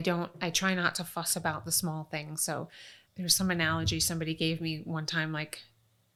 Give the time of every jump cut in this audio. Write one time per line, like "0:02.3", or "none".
none